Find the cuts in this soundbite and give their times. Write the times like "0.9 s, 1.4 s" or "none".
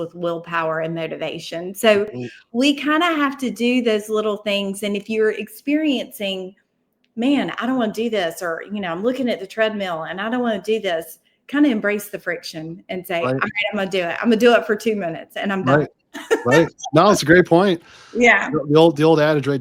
none